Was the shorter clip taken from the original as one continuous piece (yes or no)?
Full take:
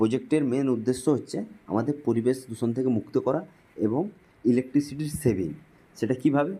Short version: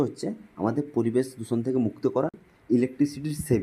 no